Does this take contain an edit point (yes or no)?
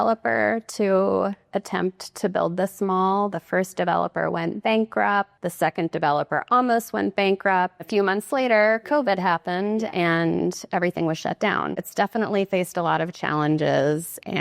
yes